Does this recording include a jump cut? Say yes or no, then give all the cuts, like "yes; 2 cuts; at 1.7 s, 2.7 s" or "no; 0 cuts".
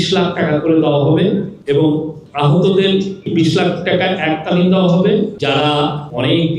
yes; 4 cuts; at 1.5 s, 2.2 s, 3.3 s, 5.8 s